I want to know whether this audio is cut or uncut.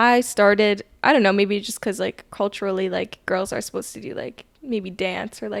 uncut